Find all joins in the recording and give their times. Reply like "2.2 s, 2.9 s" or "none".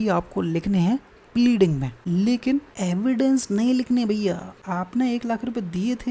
1.9 s, 2.7 s, 4.5 s